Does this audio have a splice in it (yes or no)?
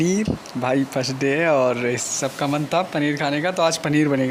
no